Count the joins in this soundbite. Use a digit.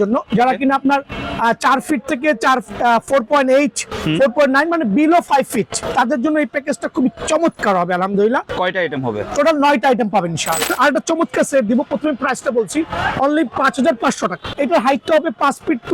4